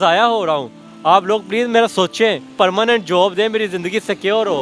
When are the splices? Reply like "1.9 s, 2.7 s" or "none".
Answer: 2.5 s